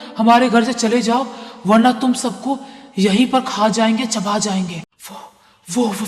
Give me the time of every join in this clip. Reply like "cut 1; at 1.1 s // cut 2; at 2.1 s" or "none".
cut 1; at 4.8 s